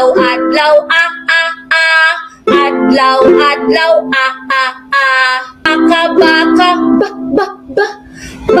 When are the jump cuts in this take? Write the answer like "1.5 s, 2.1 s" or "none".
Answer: 5.7 s